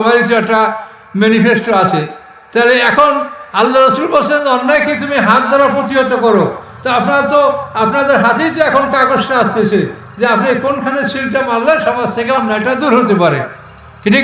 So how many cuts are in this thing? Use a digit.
0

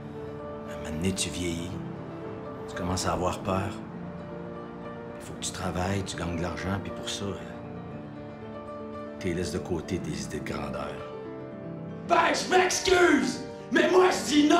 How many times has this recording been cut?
0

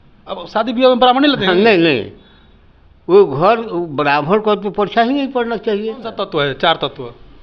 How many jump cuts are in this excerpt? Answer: 1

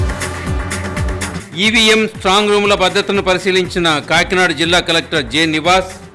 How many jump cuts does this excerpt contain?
1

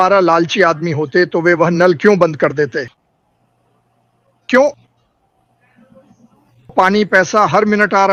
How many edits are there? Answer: 0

